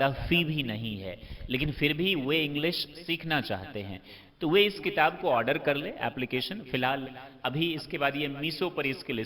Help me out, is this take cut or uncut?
uncut